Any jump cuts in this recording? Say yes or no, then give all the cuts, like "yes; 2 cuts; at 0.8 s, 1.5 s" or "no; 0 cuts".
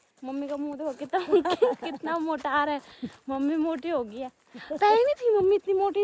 no; 0 cuts